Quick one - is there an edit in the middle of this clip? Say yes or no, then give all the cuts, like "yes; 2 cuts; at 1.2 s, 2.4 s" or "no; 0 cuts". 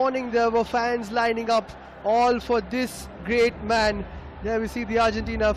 no; 0 cuts